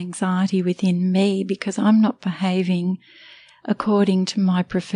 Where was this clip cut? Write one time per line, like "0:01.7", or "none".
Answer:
none

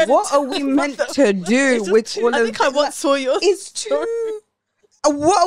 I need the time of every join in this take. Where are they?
none

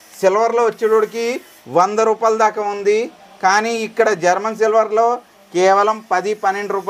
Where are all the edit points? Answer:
none

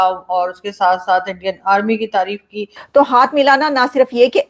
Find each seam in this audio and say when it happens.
0:02.8

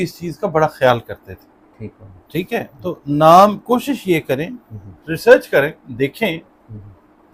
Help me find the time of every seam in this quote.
none

